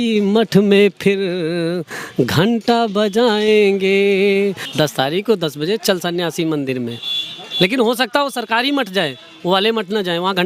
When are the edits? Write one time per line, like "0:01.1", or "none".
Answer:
0:04.6